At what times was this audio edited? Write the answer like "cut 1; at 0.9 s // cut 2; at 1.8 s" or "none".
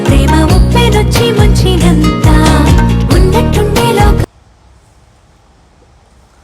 cut 1; at 4.3 s